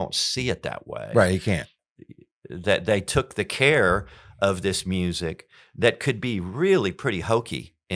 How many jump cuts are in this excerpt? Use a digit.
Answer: 1